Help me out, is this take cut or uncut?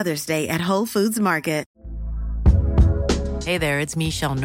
cut